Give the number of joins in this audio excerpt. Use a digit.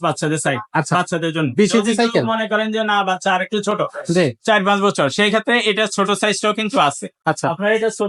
0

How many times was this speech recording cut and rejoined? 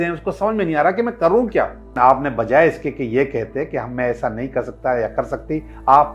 1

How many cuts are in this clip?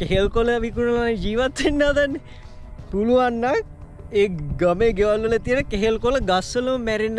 0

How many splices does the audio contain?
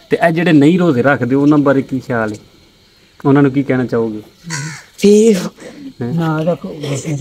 0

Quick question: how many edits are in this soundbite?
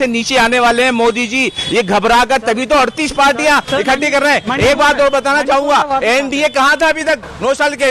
0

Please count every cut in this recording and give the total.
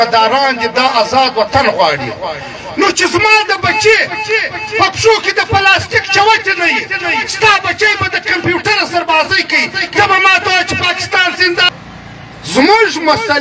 1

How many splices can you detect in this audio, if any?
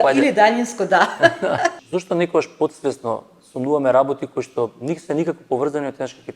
1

